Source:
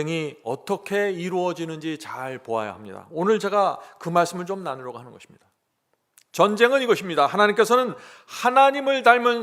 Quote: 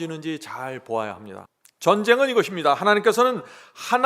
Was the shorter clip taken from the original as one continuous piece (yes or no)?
no